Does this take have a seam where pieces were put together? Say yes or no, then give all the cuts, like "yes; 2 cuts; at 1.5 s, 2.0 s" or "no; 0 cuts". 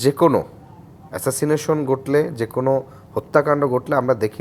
no; 0 cuts